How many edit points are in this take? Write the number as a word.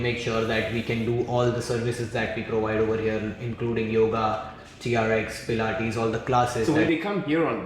one